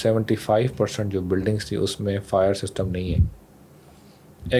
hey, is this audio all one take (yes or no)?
yes